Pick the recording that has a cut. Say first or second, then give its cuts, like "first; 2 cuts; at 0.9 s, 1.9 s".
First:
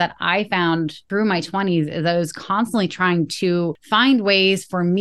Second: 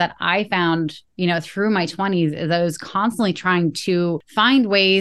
first; 1 cut; at 1.0 s